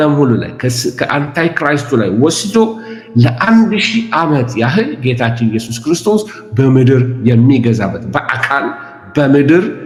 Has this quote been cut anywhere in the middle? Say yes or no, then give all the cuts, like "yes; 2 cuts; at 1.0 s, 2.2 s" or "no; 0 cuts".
no; 0 cuts